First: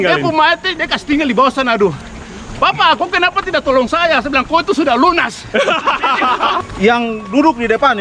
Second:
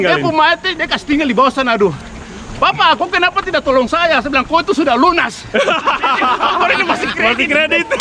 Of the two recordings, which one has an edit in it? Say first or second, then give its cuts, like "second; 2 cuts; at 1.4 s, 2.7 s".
first; 1 cut; at 6.6 s